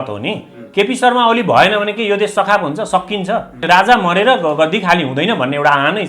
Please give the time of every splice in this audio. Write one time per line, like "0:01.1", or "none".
0:03.6